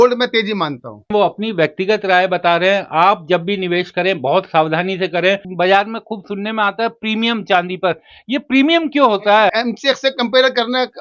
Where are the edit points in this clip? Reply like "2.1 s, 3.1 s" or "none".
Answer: 1.1 s, 5.5 s, 9.5 s